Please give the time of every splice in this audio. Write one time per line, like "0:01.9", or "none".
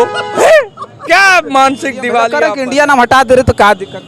0:02.4